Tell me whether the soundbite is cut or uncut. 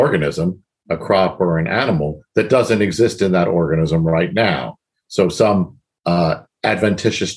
uncut